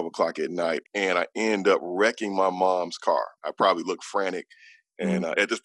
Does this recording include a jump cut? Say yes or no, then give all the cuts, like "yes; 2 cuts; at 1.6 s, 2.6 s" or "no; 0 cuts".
yes; 2 cuts; at 0.9 s, 3.4 s